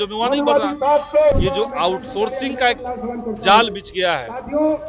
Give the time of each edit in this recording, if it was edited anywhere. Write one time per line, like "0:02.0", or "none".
0:01.4